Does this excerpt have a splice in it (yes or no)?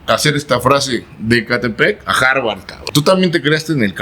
yes